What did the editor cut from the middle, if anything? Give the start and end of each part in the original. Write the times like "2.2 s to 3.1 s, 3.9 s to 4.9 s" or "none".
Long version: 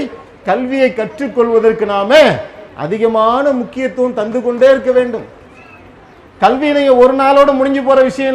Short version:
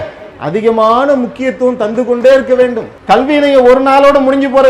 5.3 s to 6.2 s